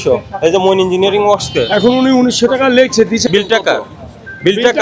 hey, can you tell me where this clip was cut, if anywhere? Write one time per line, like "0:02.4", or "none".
0:03.3